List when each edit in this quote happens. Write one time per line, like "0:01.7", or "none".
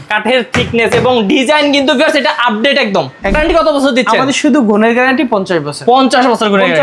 0:03.3

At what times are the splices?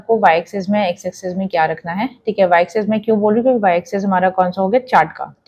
none

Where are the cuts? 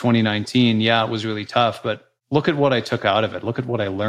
none

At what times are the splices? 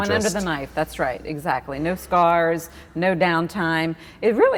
none

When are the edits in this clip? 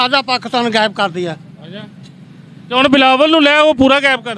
none

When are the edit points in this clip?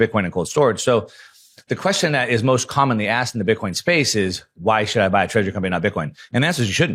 none

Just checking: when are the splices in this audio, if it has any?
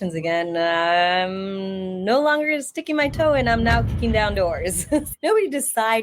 0:05.1

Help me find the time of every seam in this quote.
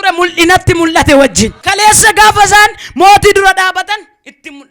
0:01.6

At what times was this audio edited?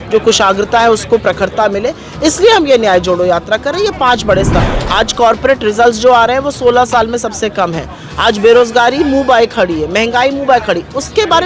0:04.6

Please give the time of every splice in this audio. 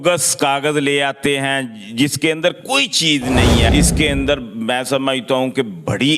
0:03.7

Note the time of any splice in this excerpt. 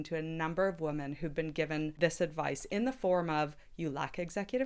0:01.9

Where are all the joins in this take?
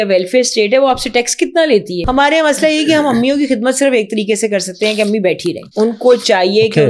0:02.0
0:05.6

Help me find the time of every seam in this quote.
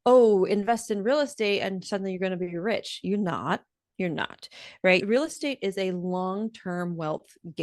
0:05.0

